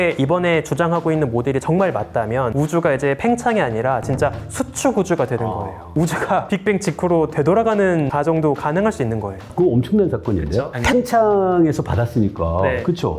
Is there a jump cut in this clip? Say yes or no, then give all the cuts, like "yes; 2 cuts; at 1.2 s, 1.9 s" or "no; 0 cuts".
yes; 4 cuts; at 2.5 s, 5.9 s, 8.1 s, 9.5 s